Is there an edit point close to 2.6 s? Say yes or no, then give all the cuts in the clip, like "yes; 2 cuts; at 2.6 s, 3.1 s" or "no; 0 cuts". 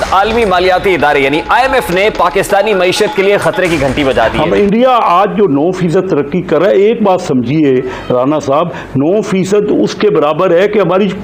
no; 1 cut; at 4.4 s